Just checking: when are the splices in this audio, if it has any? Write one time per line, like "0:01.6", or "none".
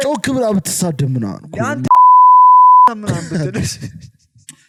none